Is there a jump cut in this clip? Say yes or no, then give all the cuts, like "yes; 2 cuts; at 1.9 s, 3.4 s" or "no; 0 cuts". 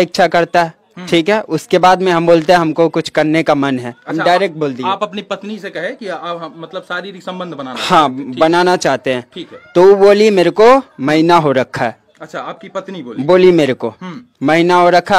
no; 0 cuts